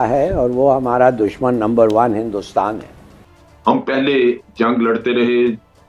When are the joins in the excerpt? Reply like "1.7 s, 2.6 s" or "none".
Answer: 3.3 s